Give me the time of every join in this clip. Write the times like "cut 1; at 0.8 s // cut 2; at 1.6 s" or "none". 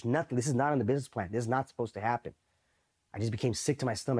none